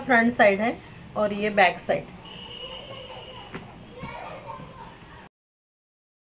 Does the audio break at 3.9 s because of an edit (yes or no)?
no